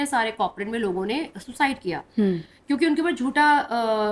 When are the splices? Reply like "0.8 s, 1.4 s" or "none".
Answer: none